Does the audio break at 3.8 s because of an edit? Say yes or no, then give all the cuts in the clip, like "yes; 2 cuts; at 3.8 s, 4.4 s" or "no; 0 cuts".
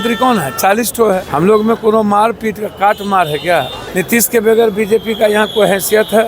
yes; 2 cuts; at 1.3 s, 3.8 s